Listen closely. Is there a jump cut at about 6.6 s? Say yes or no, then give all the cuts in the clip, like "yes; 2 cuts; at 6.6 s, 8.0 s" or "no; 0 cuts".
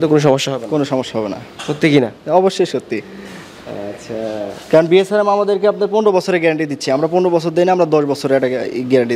no; 0 cuts